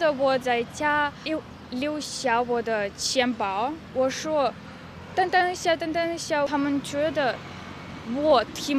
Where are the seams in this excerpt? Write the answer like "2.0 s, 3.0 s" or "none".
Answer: 1.3 s, 3.8 s